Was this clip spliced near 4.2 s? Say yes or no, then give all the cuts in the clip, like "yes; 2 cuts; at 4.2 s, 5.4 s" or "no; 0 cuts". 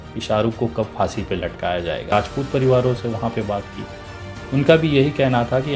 no; 1 cut; at 2.1 s